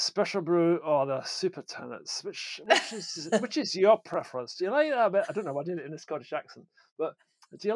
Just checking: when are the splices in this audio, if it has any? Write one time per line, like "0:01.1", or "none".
none